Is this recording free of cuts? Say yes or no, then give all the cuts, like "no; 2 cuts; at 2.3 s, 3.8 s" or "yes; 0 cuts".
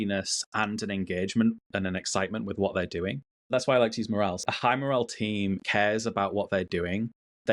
no; 3 cuts; at 3.5 s, 4.4 s, 5.6 s